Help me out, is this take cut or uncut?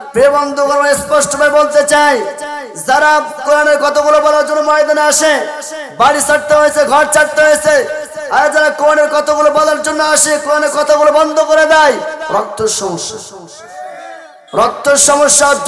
cut